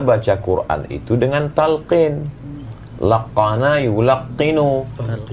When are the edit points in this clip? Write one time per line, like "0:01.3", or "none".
none